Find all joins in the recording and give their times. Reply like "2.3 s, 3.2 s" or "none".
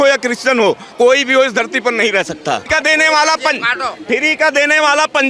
2.6 s